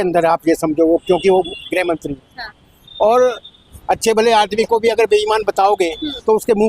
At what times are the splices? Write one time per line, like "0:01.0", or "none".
0:03.7